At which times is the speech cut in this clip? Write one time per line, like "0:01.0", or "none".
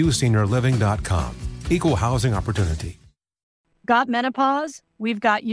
0:03.5